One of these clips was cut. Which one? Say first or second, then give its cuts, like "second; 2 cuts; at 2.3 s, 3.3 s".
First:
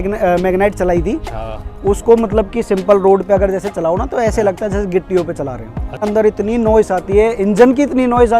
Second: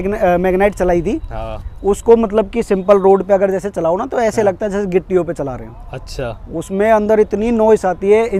first; 1 cut; at 6.0 s